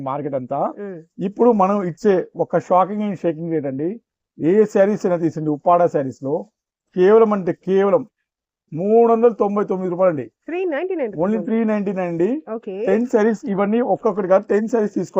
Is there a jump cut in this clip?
no; 0 cuts

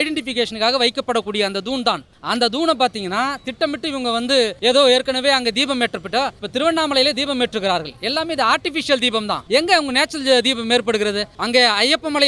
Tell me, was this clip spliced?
yes; 5 cuts; at 2.1 s, 4.5 s, 6.4 s, 9.4 s, 11.3 s

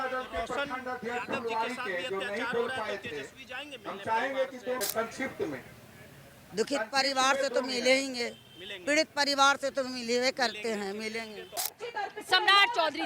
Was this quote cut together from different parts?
yes; 2 cuts; at 4.8 s, 11.6 s

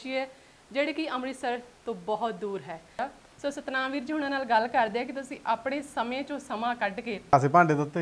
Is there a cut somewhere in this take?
yes; 2 cuts; at 3.0 s, 7.3 s

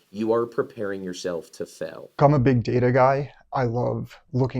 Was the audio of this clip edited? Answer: yes; 1 cut; at 2.2 s

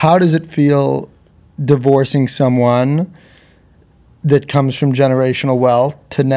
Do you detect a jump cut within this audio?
no; 0 cuts

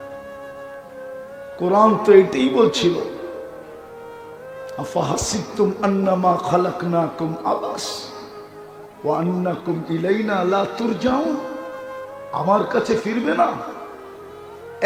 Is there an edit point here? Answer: no; 0 cuts

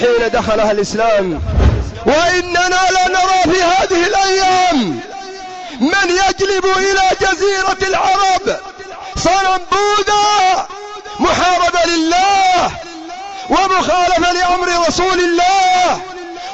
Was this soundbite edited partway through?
yes; 1 cut; at 1.5 s

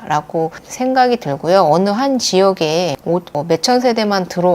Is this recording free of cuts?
yes; 0 cuts

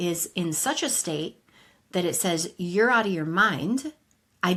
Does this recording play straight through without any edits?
yes; 0 cuts

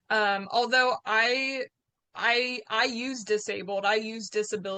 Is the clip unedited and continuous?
yes; 0 cuts

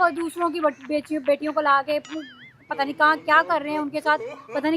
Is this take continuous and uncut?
yes; 0 cuts

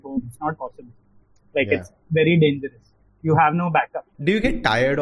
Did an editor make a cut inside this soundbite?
yes; 1 cut; at 4.1 s

